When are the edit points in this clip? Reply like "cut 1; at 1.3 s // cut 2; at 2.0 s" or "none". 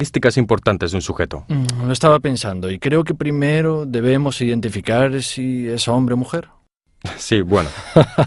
cut 1; at 2.0 s